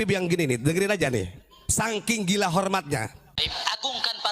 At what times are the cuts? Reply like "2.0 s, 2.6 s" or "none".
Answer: 3.4 s